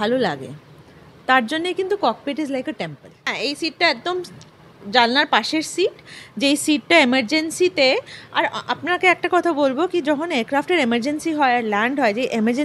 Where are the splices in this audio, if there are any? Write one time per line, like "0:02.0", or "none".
0:03.3